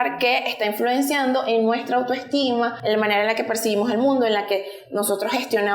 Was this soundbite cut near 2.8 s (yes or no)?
yes